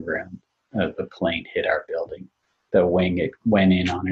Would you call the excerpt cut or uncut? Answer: cut